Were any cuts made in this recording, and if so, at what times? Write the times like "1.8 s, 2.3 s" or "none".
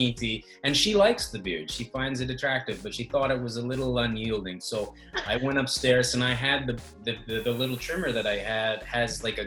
none